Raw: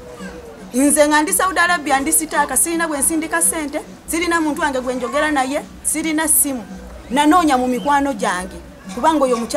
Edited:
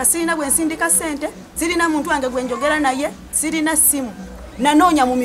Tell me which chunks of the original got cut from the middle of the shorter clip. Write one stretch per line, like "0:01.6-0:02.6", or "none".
none